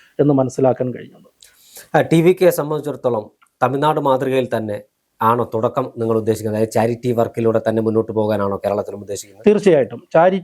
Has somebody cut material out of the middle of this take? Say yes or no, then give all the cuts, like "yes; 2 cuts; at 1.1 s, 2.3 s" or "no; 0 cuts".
no; 0 cuts